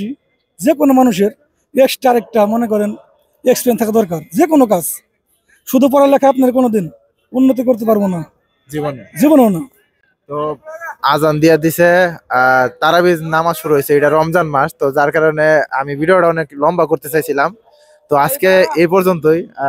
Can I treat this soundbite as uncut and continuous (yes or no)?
yes